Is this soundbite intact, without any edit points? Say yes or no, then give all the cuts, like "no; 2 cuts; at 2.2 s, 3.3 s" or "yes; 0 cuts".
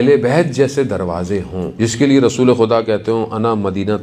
no; 1 cut; at 1.7 s